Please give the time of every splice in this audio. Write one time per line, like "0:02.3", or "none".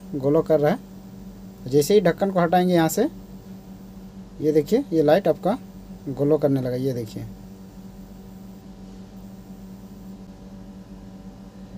0:10.3